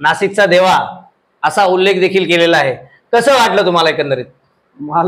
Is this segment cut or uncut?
uncut